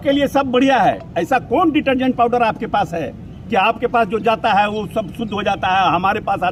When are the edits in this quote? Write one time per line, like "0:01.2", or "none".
none